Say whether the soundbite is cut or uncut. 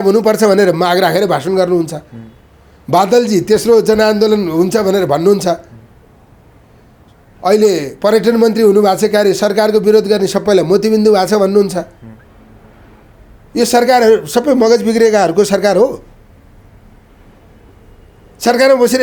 uncut